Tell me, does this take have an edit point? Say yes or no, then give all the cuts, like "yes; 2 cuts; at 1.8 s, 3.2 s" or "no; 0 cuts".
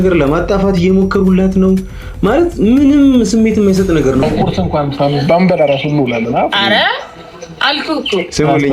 yes; 1 cut; at 4.2 s